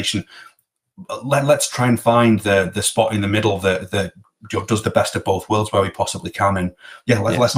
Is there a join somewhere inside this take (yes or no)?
no